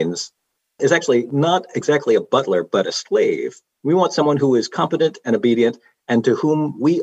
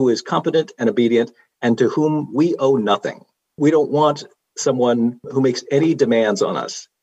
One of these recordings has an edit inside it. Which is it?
second; 1 cut; at 3.6 s

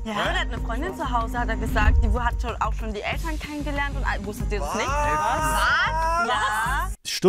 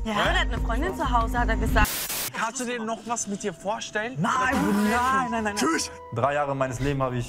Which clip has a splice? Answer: second; 1 cut; at 1.9 s

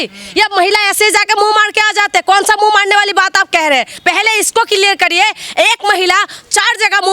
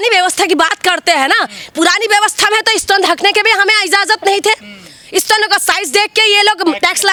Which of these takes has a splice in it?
first; 1 cut; at 3.9 s

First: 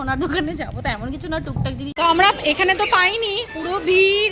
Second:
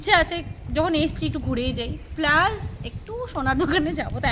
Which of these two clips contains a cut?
first; 1 cut; at 1.9 s

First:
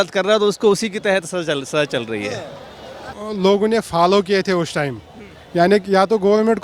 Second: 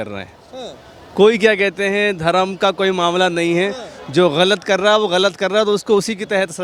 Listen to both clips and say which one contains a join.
first; 1 cut; at 3.2 s

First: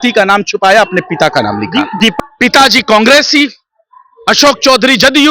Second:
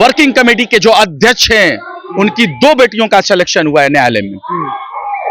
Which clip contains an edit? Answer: first; 1 cut; at 2.1 s

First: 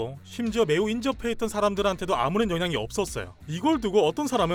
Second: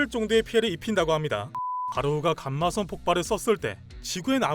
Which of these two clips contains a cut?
second; 1 cut; at 1.5 s

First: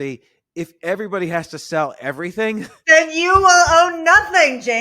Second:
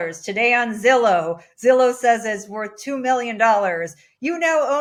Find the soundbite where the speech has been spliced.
first; 1 cut; at 2.8 s

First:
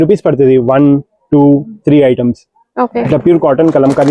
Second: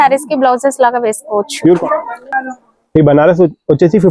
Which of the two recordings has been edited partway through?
second; 1 cut; at 1.8 s

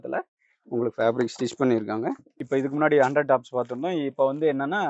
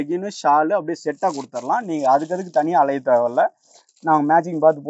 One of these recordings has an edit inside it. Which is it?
first; 1 cut; at 2.4 s

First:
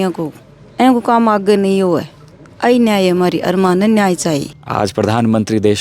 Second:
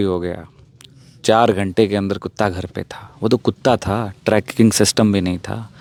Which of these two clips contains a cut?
first; 1 cut; at 4.6 s

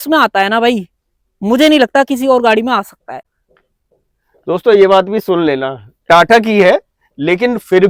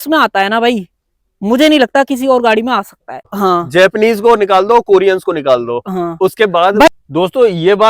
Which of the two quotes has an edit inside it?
second; 2 cuts; at 3.2 s, 6.9 s

